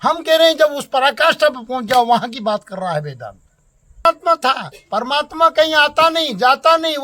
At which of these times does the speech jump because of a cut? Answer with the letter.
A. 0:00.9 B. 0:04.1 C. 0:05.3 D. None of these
B